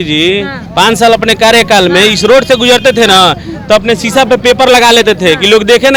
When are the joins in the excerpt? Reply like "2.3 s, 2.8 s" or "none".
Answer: none